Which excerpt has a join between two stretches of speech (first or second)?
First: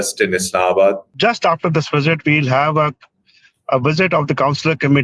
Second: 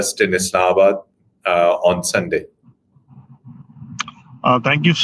first